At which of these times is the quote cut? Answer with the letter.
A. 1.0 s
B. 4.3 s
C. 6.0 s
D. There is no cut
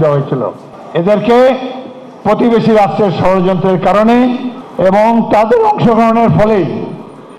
D